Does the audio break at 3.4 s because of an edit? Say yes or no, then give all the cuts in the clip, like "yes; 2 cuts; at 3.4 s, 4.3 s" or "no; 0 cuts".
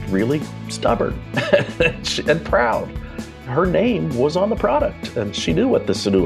yes; 2 cuts; at 3.4 s, 4.3 s